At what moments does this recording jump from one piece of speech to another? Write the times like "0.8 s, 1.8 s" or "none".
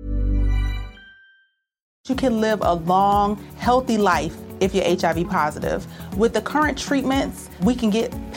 2.0 s